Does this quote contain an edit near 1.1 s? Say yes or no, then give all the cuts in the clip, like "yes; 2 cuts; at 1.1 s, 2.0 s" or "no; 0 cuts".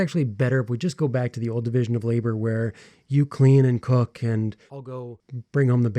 no; 1 cut; at 4.9 s